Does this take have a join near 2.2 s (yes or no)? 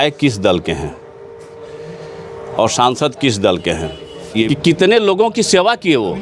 no